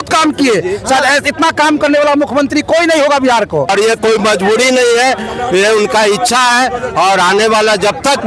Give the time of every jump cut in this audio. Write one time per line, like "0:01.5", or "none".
0:03.7